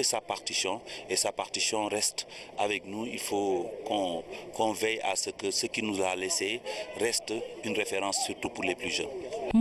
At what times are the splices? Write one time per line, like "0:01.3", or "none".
0:00.9